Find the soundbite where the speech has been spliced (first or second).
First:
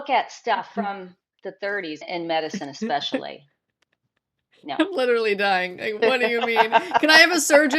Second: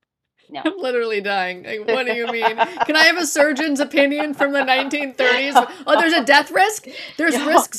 first